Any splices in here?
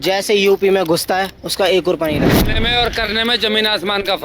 yes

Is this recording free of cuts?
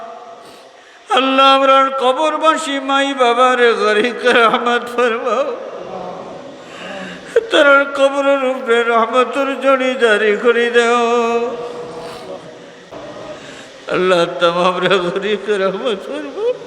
no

